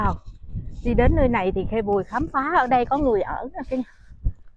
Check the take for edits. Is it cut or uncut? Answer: uncut